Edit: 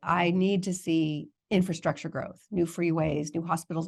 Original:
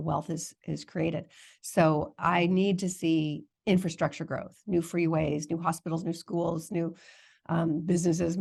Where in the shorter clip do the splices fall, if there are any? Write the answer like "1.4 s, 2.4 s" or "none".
none